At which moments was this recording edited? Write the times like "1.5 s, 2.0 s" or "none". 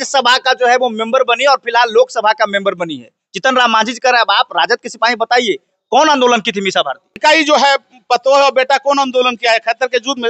7.2 s